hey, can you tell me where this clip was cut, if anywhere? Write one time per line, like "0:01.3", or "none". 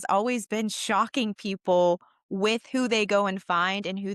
none